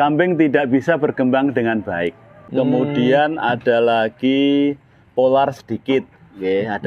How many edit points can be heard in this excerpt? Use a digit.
1